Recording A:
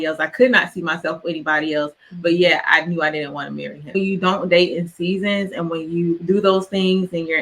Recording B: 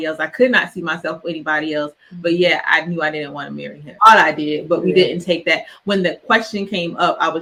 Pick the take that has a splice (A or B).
A